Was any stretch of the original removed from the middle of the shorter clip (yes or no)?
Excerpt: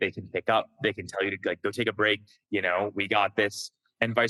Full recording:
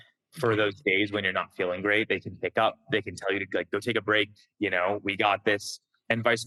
no